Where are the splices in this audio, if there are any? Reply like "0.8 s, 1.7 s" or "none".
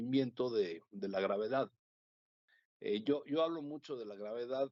none